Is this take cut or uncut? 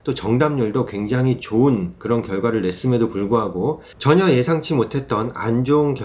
cut